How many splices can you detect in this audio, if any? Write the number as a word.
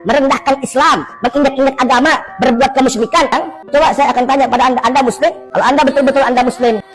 one